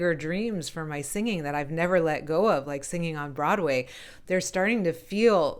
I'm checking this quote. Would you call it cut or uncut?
uncut